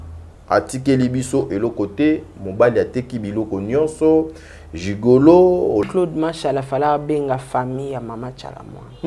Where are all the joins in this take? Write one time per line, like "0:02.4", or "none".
0:05.8